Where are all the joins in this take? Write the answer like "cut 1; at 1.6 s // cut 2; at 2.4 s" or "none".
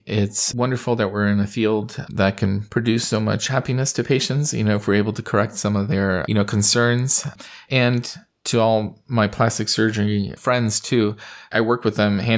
none